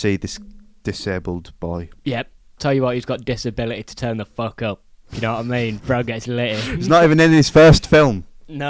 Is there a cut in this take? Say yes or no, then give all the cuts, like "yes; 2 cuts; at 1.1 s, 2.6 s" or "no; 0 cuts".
yes; 1 cut; at 2.4 s